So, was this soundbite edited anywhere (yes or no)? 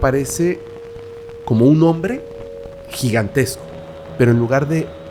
yes